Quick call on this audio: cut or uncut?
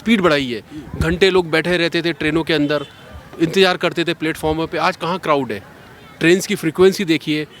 uncut